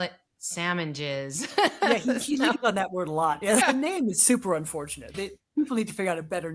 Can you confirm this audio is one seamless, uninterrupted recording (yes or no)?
no